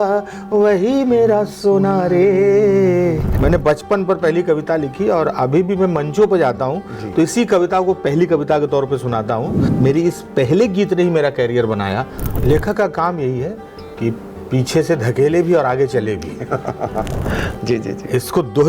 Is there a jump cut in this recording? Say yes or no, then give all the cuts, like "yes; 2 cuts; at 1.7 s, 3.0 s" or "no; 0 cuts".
yes; 3 cuts; at 3.3 s, 9.6 s, 12.3 s